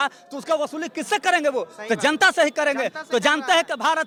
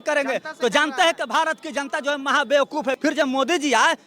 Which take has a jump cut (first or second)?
second